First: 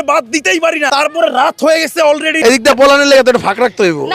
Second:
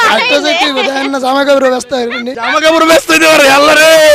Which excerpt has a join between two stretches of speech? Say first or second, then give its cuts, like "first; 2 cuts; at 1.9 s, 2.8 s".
first; 2 cuts; at 0.9 s, 2.4 s